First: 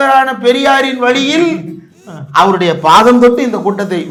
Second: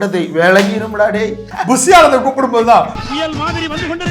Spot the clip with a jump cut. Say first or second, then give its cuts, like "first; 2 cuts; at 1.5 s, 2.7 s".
second; 1 cut; at 1.5 s